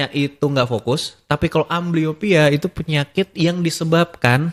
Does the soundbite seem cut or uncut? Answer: uncut